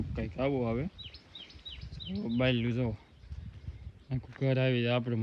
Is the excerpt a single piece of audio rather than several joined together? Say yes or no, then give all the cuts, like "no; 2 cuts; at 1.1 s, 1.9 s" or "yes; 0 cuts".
yes; 0 cuts